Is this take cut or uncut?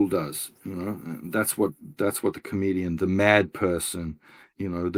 uncut